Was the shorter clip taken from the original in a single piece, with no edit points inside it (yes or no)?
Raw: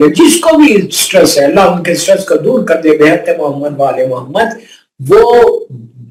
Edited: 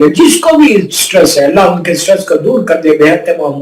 yes